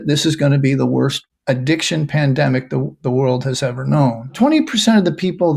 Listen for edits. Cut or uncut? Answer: cut